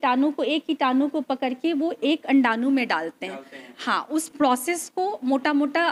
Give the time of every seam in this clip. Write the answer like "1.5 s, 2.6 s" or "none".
none